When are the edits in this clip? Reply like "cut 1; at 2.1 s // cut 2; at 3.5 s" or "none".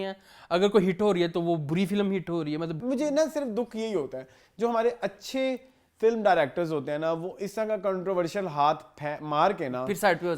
cut 1; at 2.8 s